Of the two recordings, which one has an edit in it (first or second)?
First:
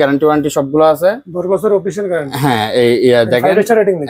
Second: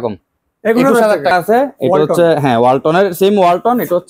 second